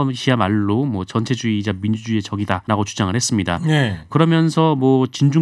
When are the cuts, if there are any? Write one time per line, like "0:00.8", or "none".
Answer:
0:02.6
0:04.1